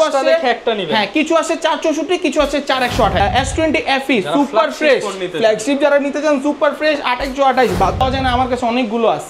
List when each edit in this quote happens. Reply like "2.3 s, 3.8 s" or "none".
3.2 s, 8.0 s